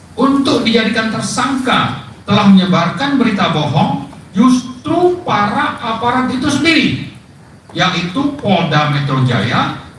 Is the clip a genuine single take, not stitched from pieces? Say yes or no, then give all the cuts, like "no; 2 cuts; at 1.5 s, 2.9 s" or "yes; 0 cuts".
yes; 0 cuts